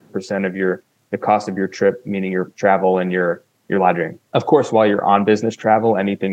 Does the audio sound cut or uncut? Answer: cut